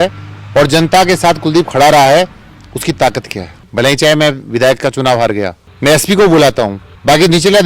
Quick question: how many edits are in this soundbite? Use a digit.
2